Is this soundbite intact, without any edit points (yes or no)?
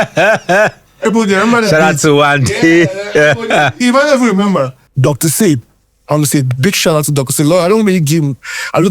no